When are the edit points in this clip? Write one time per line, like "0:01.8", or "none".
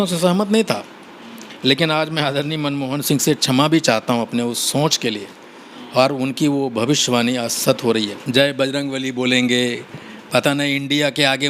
0:08.2